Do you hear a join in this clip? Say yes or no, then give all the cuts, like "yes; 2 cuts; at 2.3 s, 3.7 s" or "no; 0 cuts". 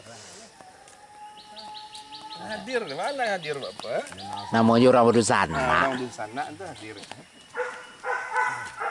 no; 0 cuts